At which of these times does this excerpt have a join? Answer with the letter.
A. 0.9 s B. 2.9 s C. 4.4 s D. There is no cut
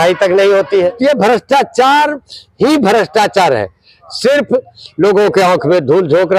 A